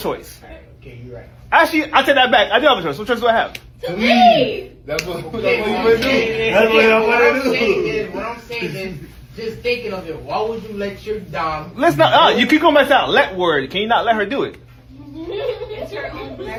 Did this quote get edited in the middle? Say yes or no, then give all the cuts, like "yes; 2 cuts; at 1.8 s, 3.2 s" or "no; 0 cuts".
no; 0 cuts